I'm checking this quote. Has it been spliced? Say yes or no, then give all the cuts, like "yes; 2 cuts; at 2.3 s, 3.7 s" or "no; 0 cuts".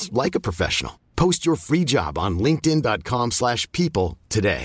no; 0 cuts